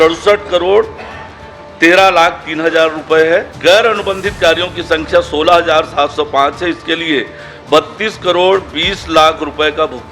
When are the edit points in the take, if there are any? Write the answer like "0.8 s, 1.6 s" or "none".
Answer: 3.5 s